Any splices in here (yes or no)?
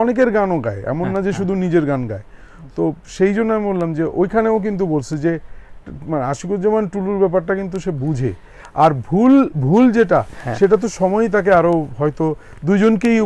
no